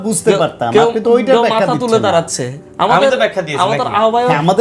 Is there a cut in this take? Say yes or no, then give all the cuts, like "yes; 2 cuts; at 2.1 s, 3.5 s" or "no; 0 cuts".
no; 0 cuts